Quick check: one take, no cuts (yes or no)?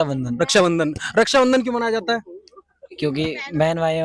yes